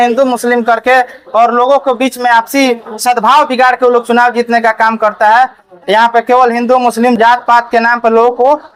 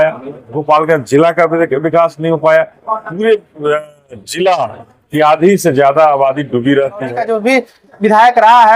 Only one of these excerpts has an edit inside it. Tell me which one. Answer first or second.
second